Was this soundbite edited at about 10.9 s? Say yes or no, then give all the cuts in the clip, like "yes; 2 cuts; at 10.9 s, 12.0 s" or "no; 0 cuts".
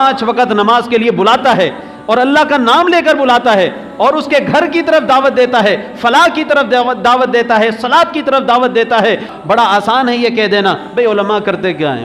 no; 1 cut; at 9.3 s